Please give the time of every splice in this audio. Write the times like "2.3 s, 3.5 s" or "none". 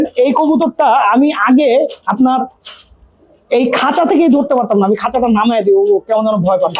none

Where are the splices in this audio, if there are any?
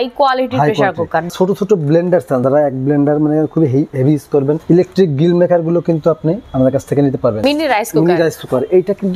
1.3 s, 2.4 s, 4.6 s, 6.4 s, 7.4 s

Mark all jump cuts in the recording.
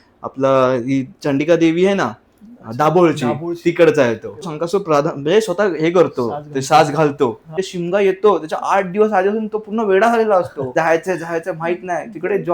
4.6 s, 7.6 s, 10.7 s

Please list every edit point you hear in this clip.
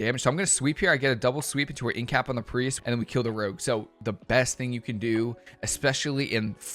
2.8 s, 4.0 s

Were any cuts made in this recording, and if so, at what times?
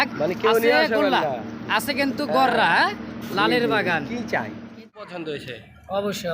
5.0 s

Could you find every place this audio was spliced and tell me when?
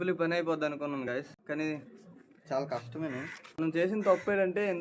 1.1 s, 3.5 s

